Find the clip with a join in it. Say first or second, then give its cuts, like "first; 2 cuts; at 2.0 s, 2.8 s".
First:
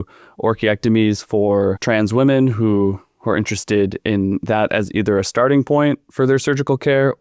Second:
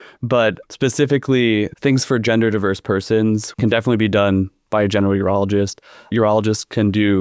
second; 3 cuts; at 1.7 s, 3.5 s, 6.1 s